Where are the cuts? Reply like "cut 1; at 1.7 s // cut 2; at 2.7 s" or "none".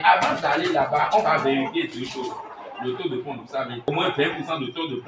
cut 1; at 3.9 s